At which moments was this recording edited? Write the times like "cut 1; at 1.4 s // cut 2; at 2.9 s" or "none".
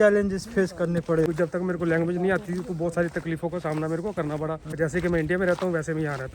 cut 1; at 1.3 s // cut 2; at 4.8 s